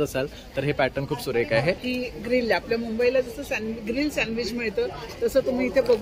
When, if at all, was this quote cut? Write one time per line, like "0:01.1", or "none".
0:01.9